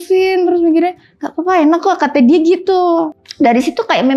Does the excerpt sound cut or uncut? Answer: cut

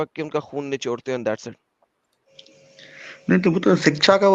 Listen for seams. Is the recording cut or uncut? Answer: uncut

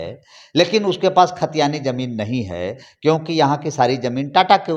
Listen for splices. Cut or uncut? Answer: uncut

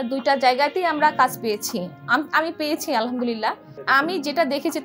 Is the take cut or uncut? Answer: cut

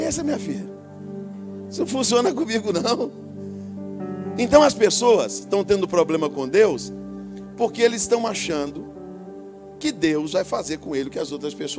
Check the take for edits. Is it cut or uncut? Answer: uncut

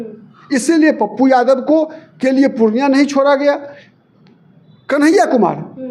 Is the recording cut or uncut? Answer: uncut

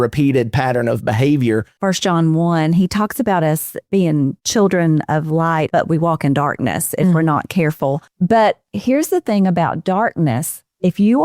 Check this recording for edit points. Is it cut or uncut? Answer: cut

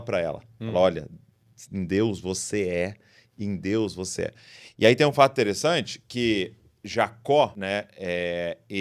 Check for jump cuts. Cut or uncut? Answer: cut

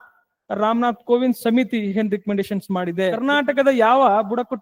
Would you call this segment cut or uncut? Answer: cut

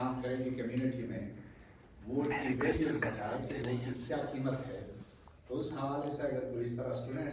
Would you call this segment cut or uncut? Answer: uncut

